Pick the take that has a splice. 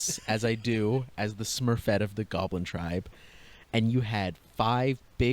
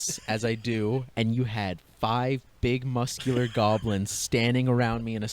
second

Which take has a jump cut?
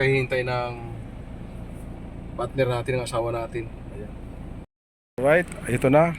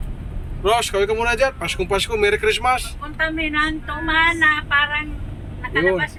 first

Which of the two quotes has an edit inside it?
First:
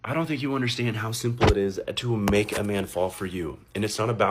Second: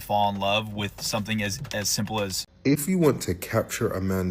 second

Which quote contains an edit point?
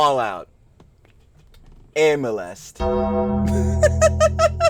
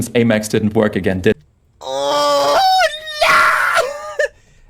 second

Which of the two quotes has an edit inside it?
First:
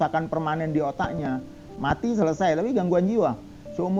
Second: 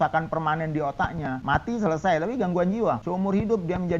second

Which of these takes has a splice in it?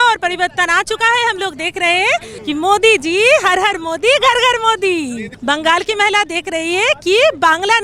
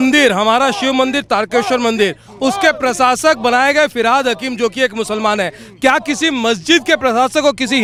first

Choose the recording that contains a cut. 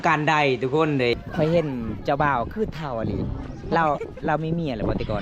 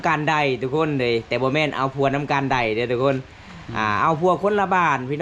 first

